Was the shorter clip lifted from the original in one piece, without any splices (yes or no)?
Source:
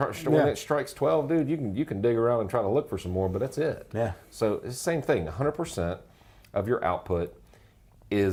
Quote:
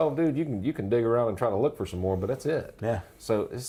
yes